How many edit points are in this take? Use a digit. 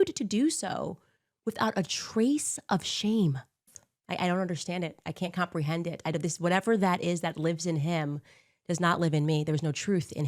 1